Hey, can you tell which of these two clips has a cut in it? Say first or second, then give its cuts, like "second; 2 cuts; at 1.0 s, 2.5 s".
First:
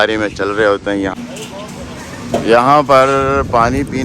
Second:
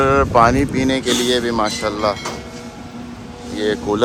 first; 1 cut; at 1.1 s